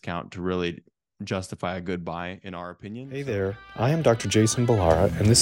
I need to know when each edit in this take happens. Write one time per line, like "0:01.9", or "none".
0:03.1

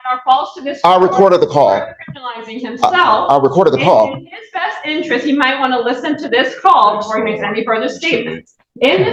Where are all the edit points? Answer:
none

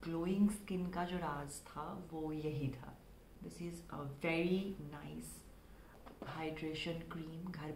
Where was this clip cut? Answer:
0:03.3
0:06.0

